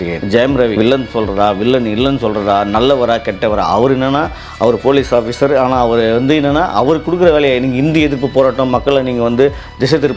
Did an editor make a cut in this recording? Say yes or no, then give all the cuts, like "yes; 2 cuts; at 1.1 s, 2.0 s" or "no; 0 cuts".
no; 0 cuts